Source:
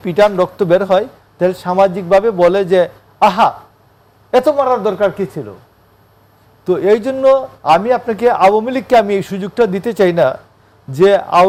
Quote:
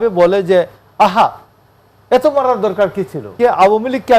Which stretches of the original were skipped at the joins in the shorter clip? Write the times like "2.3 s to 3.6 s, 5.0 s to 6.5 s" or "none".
5.5 s to 8.1 s